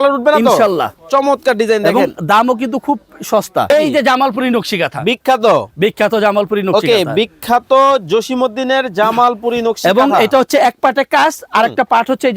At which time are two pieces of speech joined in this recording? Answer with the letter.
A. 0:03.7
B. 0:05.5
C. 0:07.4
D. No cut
A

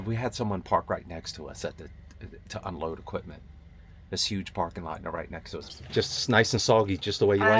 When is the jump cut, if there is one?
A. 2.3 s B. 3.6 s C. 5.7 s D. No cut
C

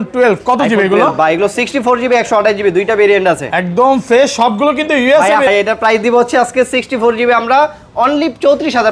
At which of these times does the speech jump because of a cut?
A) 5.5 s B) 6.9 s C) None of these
A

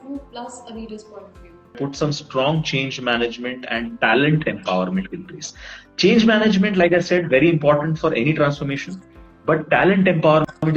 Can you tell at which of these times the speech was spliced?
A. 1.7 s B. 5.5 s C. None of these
A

